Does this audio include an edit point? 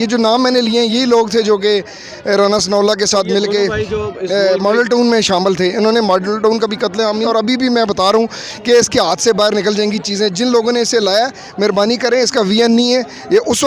yes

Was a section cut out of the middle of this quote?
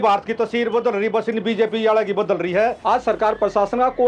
yes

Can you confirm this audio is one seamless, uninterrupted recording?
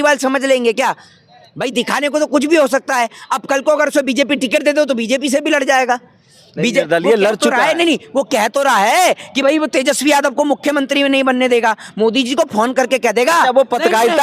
yes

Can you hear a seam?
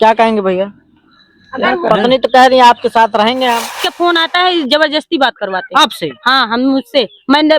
yes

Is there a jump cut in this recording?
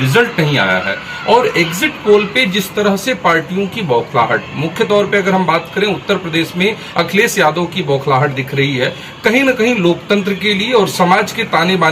no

